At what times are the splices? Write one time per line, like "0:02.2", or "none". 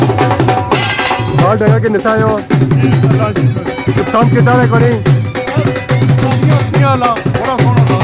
0:01.3